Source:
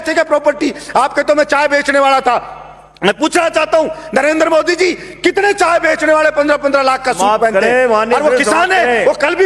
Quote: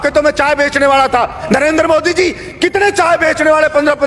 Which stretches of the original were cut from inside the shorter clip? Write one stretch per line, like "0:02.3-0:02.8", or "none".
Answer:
0:02.5-0:04.0